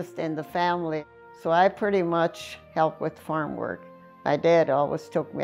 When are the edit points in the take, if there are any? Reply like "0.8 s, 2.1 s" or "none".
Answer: 1.1 s, 2.6 s